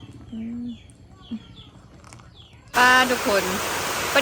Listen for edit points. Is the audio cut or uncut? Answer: cut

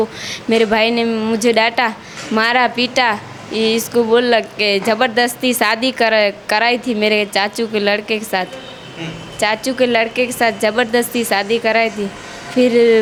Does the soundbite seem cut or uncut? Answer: uncut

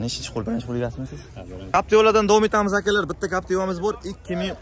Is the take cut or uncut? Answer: cut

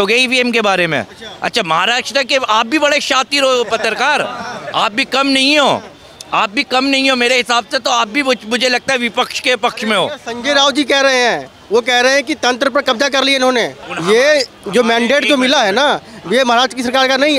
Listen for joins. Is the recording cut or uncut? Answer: uncut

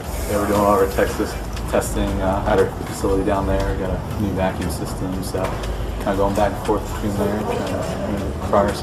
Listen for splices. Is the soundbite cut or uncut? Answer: uncut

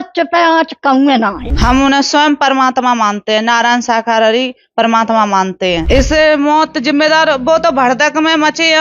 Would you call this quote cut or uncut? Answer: cut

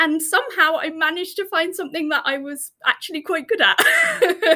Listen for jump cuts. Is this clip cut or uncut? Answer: uncut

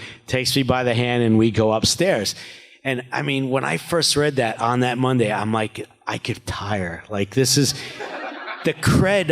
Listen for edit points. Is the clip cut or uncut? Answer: cut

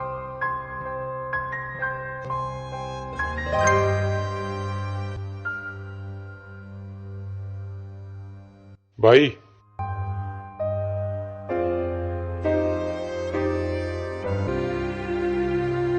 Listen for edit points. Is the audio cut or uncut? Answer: cut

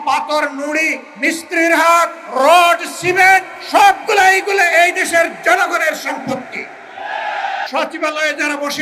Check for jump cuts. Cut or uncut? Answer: cut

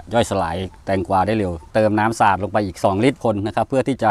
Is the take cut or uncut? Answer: cut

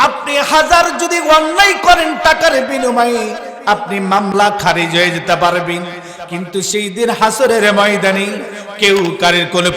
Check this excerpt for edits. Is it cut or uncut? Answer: cut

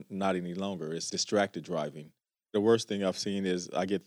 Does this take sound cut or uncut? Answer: cut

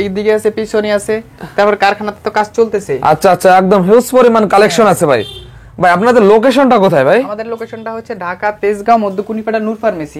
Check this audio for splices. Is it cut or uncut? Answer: uncut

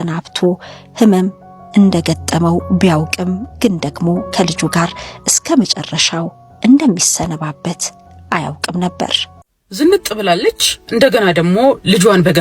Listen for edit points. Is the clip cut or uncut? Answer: cut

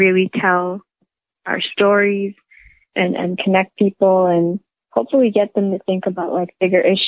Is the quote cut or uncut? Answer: uncut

